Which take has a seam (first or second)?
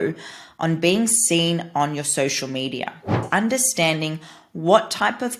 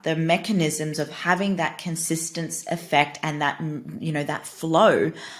first